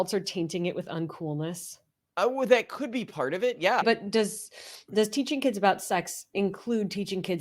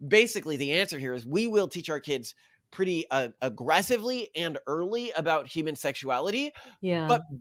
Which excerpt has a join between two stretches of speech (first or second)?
first